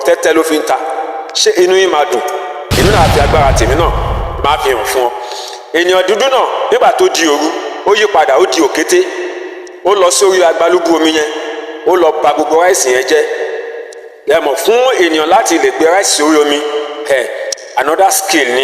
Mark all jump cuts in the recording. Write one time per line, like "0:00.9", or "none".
0:02.7